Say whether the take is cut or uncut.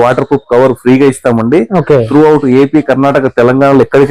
uncut